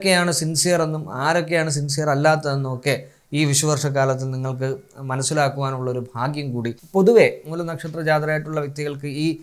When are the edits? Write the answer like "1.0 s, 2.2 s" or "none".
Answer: 6.8 s

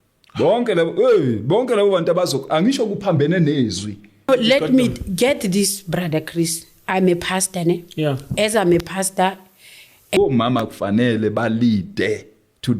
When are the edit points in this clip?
4.3 s, 10.2 s

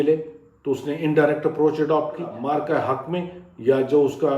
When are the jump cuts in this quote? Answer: 2.4 s

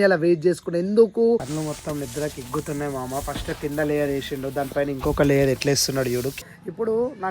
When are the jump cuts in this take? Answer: 1.5 s, 6.4 s

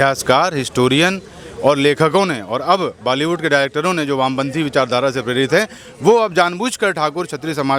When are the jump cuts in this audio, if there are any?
none

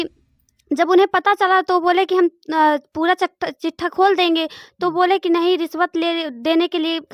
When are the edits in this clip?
none

